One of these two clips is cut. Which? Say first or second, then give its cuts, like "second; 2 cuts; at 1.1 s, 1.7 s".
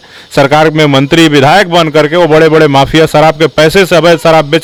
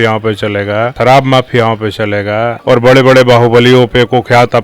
second; 2 cuts; at 0.9 s, 2.5 s